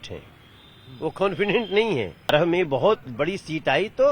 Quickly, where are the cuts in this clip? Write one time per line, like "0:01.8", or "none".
0:02.3